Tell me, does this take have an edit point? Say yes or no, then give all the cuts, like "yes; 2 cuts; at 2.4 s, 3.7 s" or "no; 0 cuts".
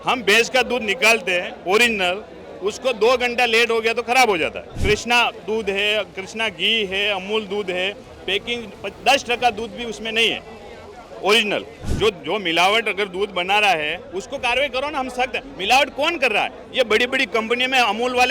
yes; 2 cuts; at 4.7 s, 11.8 s